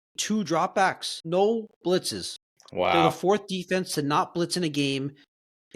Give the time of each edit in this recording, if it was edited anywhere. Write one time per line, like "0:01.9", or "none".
0:01.1